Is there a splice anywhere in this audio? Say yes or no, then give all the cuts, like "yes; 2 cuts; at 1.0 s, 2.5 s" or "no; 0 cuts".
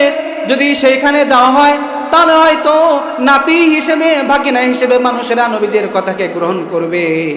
no; 0 cuts